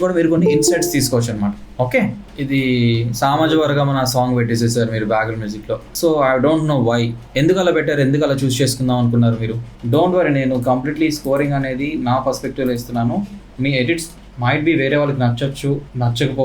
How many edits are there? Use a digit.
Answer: 2